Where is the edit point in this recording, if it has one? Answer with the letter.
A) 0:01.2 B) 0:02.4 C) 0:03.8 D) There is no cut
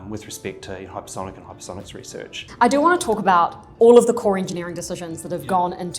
B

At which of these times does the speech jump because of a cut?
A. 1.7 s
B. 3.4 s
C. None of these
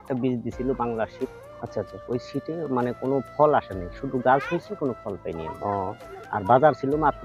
C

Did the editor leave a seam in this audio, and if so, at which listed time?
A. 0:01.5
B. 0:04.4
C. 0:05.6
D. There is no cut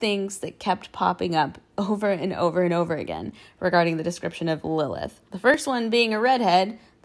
C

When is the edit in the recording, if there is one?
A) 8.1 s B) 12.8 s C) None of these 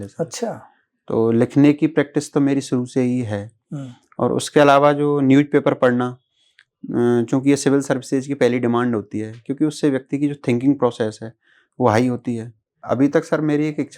B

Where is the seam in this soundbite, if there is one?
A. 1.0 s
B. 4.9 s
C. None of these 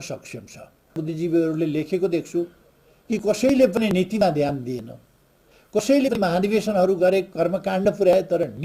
A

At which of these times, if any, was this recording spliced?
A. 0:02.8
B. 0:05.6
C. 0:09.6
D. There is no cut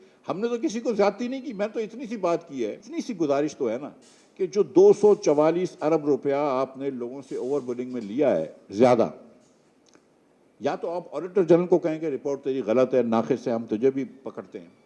A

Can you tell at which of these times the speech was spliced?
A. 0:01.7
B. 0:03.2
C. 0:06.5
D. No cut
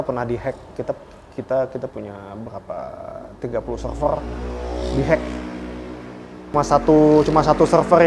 C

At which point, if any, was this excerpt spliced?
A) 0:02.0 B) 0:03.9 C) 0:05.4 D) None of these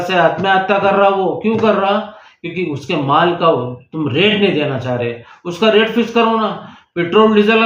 D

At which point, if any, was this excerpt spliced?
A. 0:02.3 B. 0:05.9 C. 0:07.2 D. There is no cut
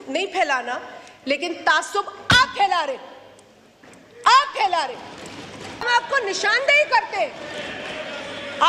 B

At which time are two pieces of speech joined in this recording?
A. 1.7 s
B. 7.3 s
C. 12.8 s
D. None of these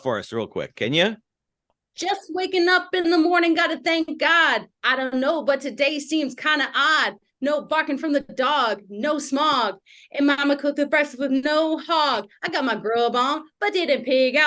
A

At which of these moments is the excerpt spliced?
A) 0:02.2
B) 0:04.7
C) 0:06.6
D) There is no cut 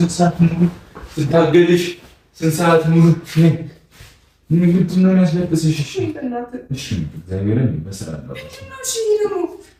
D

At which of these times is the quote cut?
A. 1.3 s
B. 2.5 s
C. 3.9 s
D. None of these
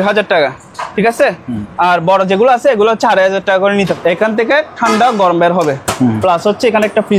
C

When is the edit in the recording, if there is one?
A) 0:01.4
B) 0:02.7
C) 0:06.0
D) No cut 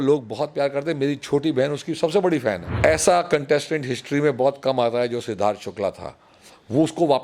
B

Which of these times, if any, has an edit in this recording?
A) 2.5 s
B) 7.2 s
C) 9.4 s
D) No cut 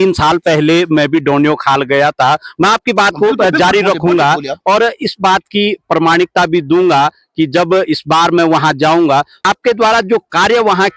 C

